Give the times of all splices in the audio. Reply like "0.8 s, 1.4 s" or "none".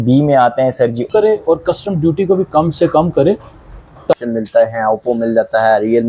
1.1 s, 4.1 s